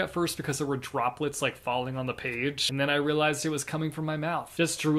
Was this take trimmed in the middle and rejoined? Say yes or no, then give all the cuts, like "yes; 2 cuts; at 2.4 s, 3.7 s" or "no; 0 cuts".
no; 0 cuts